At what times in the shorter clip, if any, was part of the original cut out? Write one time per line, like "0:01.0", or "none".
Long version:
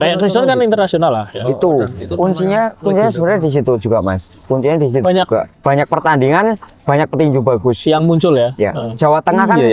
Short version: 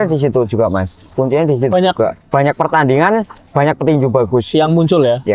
none